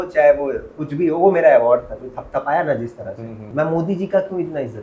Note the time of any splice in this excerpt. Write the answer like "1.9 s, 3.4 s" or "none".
3.4 s